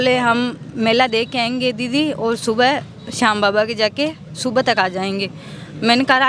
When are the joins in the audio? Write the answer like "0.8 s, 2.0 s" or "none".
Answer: none